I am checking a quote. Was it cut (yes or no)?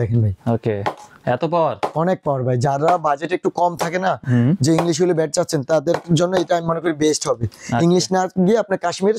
no